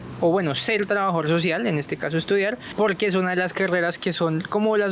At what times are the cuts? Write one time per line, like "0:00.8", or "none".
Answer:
0:02.6